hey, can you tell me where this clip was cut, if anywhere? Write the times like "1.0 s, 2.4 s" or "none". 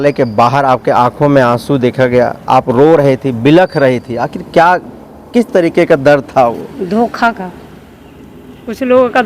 none